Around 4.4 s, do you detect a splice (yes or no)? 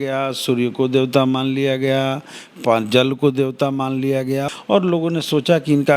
yes